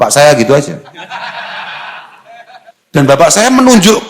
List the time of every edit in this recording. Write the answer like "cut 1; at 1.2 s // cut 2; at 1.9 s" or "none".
cut 1; at 3.2 s